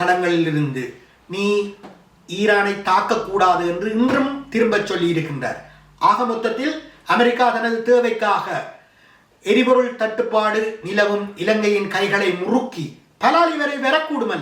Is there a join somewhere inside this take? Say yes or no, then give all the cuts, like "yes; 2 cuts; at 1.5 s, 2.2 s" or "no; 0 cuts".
no; 0 cuts